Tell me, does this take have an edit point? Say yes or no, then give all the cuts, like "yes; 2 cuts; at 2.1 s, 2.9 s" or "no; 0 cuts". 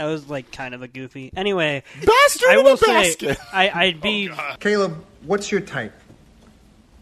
yes; 1 cut; at 4.4 s